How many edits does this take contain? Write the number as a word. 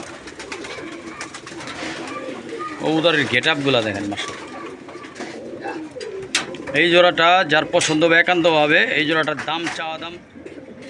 one